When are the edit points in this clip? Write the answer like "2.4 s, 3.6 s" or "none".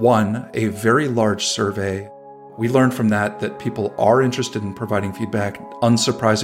2.1 s

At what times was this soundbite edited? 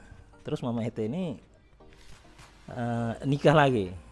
none

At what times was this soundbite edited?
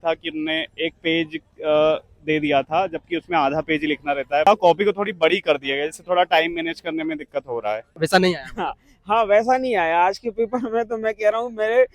4.5 s, 7.9 s

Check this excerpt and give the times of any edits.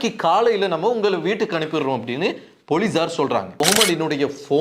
3.6 s

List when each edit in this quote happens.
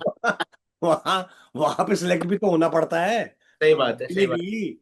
none

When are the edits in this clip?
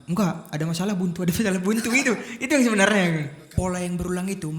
3.4 s

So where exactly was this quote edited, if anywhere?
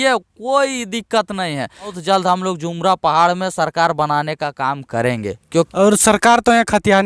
2.0 s, 5.7 s

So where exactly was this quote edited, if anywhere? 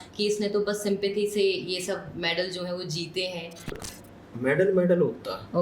3.8 s

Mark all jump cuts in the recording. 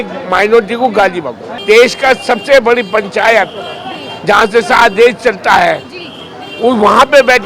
1.5 s

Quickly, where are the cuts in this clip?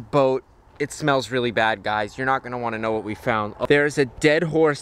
3.6 s

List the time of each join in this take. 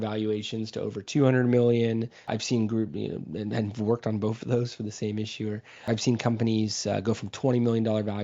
2.3 s, 5.9 s

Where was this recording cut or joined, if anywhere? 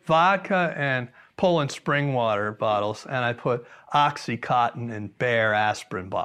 none

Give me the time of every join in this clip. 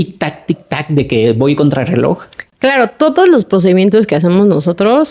none

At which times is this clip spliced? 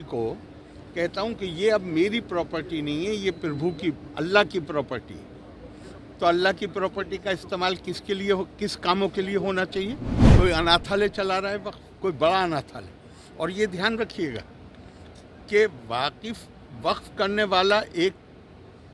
10.2 s

